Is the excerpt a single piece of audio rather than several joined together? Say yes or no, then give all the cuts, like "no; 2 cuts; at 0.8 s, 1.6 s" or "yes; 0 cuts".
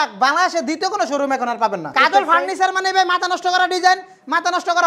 no; 1 cut; at 1.9 s